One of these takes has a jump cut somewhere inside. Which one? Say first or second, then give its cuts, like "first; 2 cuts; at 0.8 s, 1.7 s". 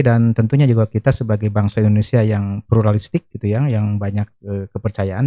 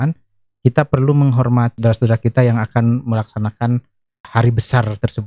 second; 2 cuts; at 1.8 s, 4.2 s